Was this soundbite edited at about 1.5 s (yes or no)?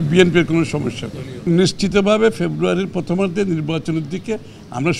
yes